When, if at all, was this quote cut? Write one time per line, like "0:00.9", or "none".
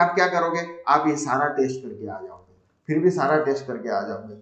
none